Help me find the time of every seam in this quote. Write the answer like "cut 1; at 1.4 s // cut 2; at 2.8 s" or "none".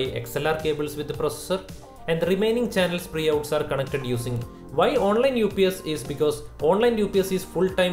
cut 1; at 4.4 s